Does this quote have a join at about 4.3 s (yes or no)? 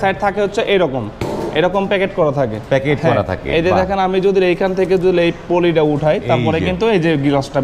no